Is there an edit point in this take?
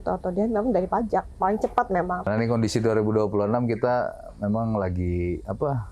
yes; 1 cut; at 2.2 s

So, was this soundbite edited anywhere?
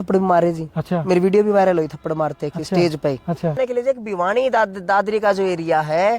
yes; 1 cut; at 3.6 s

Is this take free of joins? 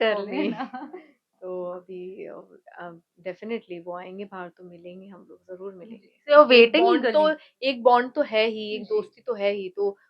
yes; 0 cuts

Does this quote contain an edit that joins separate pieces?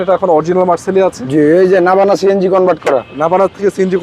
no; 0 cuts

